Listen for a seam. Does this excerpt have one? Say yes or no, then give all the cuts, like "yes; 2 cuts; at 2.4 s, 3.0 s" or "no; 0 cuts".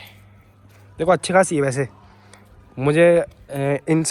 no; 0 cuts